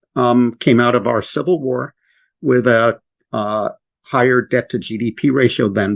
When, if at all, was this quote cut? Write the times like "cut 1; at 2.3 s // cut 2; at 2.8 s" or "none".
none